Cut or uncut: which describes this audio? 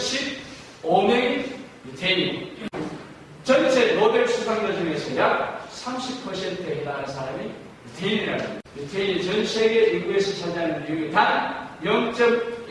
cut